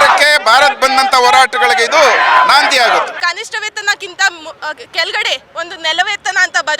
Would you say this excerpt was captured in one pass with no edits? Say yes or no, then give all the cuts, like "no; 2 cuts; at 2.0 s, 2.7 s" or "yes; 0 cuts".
no; 1 cut; at 3.1 s